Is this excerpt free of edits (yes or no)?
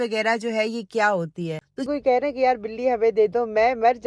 no